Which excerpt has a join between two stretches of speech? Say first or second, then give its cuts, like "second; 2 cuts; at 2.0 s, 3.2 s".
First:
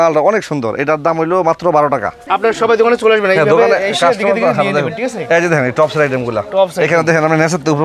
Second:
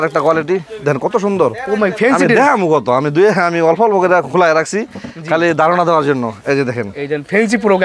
first; 1 cut; at 2.2 s